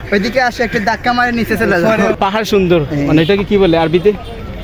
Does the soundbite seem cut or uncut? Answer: cut